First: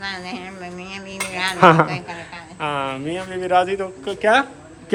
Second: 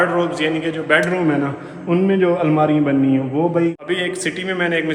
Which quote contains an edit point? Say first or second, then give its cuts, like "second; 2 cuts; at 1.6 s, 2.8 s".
second; 1 cut; at 3.8 s